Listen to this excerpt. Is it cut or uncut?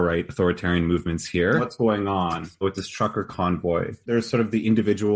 cut